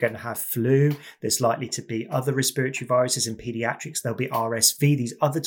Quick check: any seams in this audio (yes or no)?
no